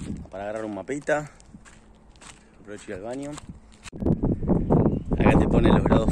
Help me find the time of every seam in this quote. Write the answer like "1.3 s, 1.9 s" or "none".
3.9 s